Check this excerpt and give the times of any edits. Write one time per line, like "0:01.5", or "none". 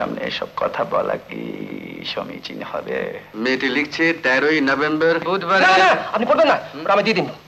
0:03.2